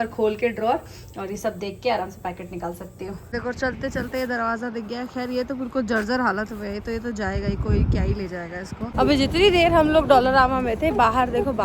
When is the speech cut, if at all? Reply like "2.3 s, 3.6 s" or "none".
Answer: 3.4 s, 8.9 s